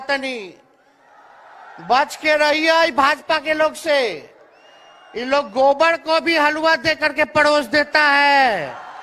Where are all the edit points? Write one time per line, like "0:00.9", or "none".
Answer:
none